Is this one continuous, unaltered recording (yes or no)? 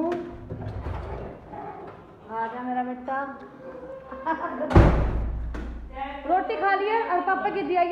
yes